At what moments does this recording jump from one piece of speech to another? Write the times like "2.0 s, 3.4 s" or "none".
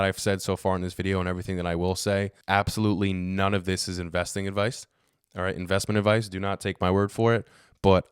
2.4 s